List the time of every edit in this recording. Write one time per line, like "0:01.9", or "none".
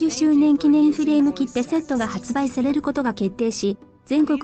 0:01.6
0:03.4